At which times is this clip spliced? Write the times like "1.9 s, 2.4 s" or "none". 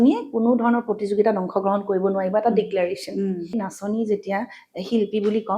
3.5 s

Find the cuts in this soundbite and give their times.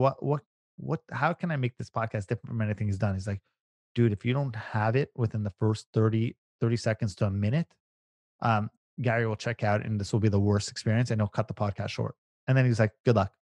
12.3 s

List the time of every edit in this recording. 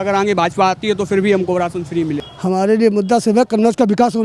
2.3 s

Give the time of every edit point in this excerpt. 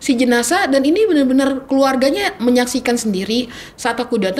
none

